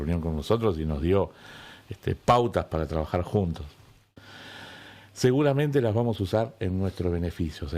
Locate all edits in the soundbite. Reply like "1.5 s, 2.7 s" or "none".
4.1 s